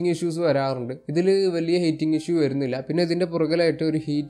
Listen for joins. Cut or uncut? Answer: uncut